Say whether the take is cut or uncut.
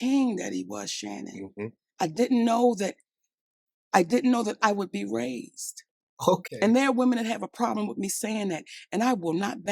uncut